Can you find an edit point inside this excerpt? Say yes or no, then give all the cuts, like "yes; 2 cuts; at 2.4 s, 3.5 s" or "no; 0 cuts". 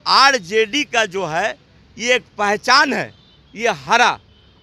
no; 0 cuts